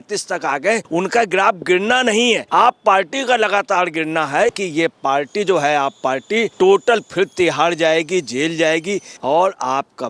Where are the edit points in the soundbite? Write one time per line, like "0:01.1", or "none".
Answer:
0:00.9
0:02.4
0:04.6
0:06.5
0:09.1